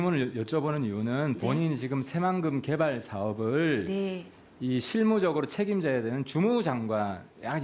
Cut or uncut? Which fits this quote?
uncut